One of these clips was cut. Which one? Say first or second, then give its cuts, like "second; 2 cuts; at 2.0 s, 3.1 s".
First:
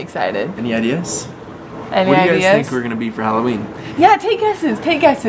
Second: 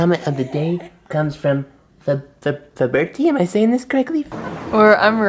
second; 1 cut; at 4.4 s